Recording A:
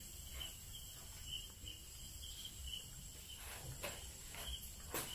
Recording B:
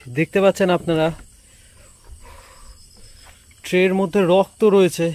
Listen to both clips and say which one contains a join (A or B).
A